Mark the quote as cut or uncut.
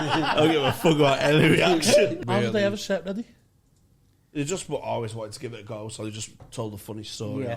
cut